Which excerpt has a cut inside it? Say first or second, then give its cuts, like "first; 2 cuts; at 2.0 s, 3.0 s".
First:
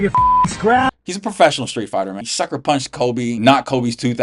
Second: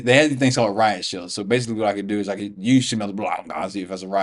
first; 3 cuts; at 0.9 s, 2.2 s, 3.4 s